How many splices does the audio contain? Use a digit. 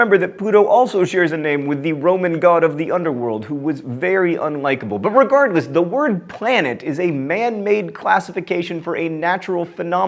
1